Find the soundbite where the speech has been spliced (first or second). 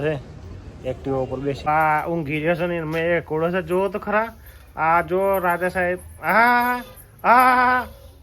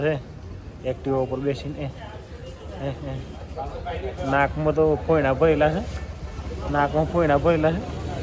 first